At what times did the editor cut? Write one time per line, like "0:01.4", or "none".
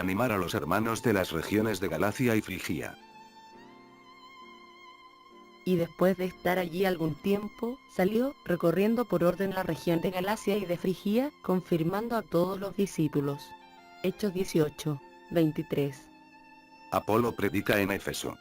0:09.4